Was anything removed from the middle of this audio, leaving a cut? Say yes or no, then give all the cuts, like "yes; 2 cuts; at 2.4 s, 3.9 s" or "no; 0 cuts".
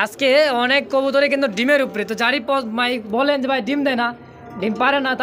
no; 0 cuts